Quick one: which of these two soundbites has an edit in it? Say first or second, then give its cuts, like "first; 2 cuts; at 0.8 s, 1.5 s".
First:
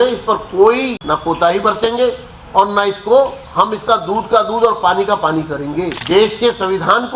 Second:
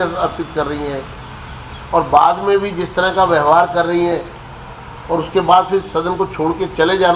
first; 3 cuts; at 1.0 s, 2.3 s, 6.0 s